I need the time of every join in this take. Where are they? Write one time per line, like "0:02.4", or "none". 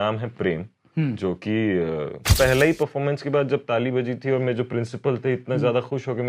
0:02.3